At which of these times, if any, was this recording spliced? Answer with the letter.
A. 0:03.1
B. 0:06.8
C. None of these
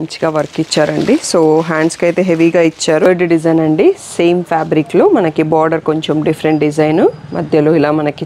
A